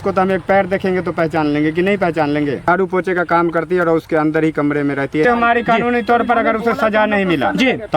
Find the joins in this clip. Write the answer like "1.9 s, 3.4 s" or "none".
2.7 s, 5.2 s